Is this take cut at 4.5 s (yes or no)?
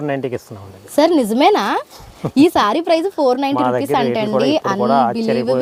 no